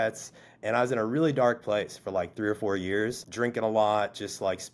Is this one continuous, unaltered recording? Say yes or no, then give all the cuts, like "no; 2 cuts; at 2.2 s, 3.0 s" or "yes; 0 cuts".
no; 1 cut; at 3.2 s